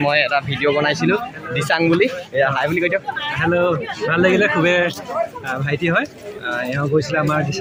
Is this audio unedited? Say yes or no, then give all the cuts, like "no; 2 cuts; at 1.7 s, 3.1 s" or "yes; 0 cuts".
yes; 0 cuts